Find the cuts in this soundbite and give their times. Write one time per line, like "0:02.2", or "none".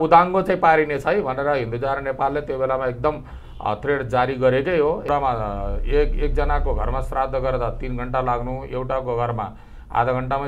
0:05.1